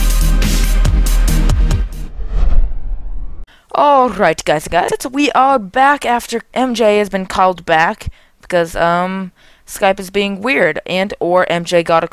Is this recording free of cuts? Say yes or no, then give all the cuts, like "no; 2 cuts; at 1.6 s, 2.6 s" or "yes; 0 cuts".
yes; 0 cuts